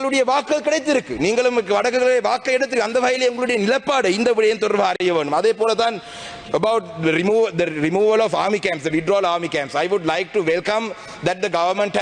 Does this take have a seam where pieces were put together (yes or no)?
no